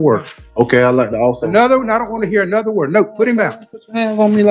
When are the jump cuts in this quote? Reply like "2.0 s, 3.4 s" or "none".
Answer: none